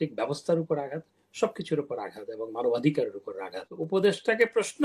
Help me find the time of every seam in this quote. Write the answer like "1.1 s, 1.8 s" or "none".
3.7 s